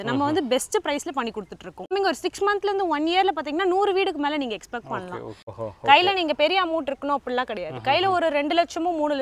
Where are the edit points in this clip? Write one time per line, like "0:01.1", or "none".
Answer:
0:01.9
0:05.5